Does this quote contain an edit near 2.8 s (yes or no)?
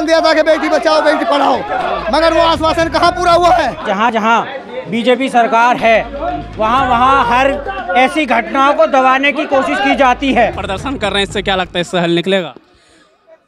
no